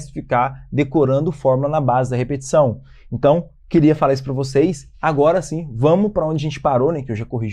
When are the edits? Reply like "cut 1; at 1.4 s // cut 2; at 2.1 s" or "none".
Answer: none